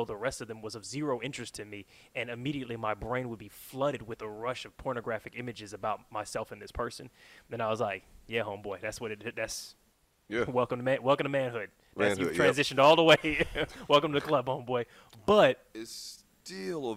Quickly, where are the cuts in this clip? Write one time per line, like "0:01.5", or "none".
0:15.7